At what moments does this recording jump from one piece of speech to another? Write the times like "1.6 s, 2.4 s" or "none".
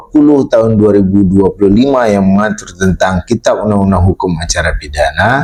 none